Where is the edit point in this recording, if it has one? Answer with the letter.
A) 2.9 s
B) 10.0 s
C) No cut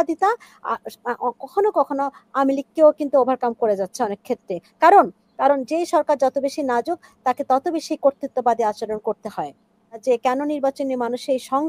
B